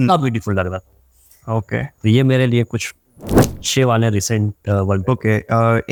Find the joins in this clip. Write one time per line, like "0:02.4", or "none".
none